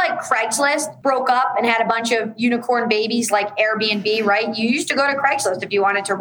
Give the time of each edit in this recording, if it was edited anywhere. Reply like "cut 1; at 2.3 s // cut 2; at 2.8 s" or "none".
cut 1; at 0.9 s